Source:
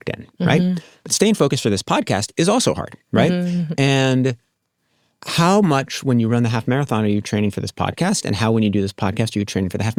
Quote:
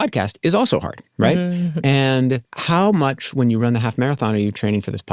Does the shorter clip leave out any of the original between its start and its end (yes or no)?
yes